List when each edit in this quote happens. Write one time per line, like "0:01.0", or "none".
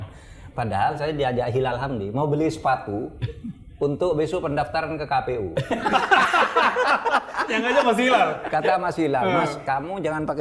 none